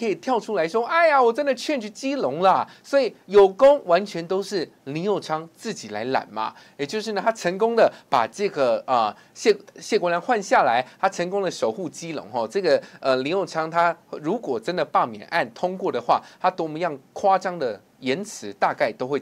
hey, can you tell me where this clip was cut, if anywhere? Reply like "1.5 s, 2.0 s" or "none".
none